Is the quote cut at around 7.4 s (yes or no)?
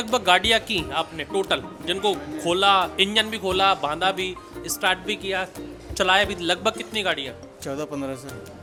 no